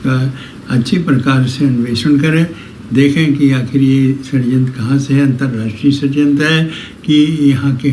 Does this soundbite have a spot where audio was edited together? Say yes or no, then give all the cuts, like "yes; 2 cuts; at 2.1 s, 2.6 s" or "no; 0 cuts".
no; 0 cuts